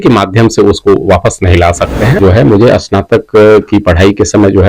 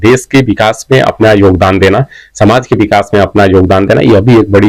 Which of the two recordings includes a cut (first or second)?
first